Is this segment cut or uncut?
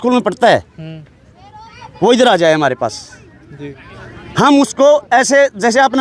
uncut